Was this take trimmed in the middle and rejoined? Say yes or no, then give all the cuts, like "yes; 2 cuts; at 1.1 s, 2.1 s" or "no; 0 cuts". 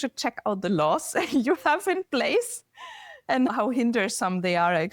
yes; 1 cut; at 3.5 s